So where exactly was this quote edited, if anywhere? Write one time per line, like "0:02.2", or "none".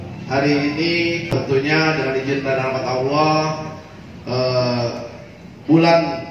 0:01.3